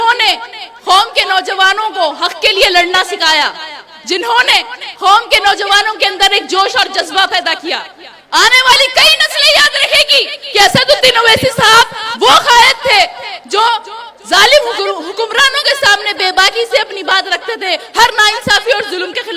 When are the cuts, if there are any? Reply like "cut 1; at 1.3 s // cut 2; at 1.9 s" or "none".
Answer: none